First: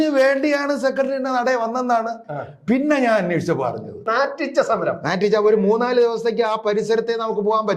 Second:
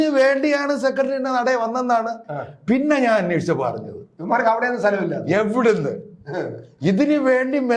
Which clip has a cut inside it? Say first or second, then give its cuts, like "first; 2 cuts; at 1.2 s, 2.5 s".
first; 1 cut; at 4.0 s